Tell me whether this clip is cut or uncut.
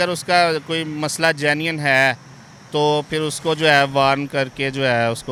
uncut